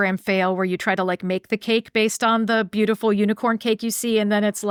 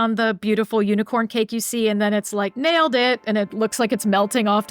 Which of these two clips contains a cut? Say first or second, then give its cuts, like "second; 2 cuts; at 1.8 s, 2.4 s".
second; 1 cut; at 3.5 s